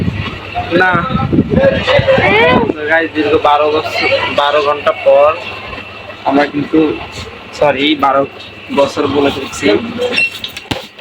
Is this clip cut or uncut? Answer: uncut